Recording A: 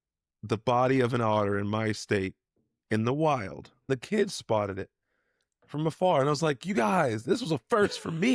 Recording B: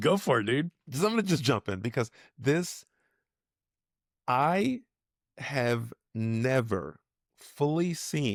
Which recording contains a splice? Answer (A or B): A